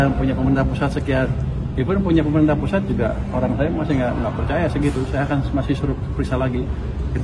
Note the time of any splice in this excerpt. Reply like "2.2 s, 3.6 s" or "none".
none